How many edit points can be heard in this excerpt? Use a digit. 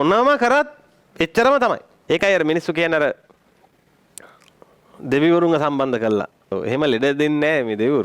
2